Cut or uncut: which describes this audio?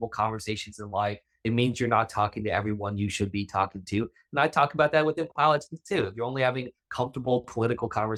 uncut